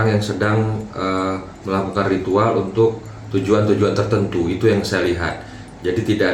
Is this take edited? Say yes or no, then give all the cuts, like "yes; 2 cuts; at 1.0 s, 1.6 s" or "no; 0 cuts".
no; 0 cuts